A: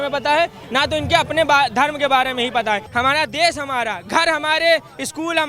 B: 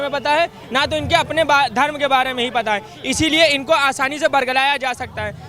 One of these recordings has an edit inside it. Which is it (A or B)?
A